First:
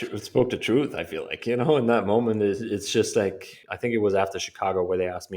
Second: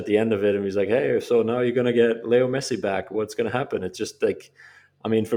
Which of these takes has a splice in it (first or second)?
first